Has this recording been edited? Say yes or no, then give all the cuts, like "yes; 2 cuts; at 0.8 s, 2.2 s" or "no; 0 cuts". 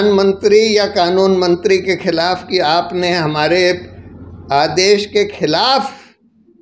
no; 0 cuts